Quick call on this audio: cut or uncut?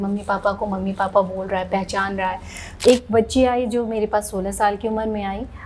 cut